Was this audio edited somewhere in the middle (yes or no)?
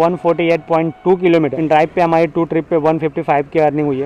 yes